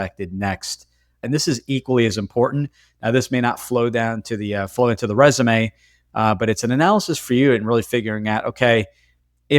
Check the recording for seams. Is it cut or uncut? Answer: cut